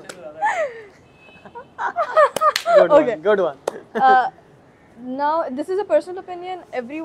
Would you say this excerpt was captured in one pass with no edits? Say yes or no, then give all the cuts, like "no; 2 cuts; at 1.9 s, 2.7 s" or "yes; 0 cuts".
yes; 0 cuts